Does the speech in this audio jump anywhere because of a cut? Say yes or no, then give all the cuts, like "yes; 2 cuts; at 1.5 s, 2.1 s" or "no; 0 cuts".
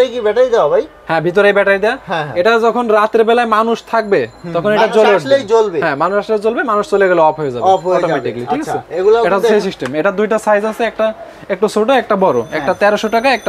no; 0 cuts